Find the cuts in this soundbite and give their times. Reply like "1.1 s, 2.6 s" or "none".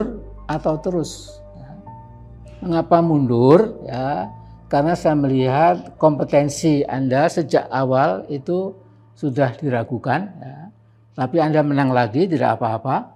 none